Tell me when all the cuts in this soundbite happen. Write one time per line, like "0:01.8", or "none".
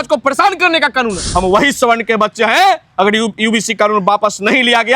0:01.2